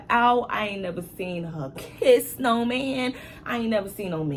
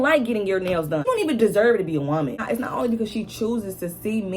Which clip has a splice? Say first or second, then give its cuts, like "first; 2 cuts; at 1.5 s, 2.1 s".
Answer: second; 2 cuts; at 1.0 s, 2.4 s